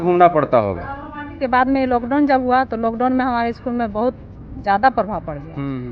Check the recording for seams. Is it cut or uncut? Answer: cut